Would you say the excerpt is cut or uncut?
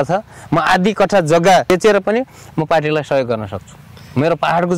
cut